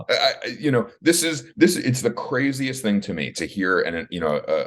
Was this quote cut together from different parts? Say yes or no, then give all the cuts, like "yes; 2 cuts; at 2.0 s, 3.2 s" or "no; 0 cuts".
no; 0 cuts